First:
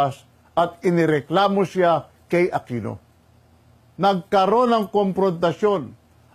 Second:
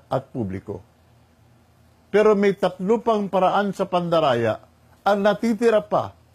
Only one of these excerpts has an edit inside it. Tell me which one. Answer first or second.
first